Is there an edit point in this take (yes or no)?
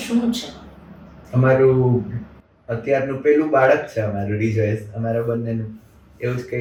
no